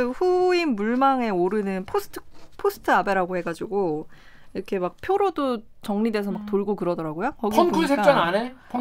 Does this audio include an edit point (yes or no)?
no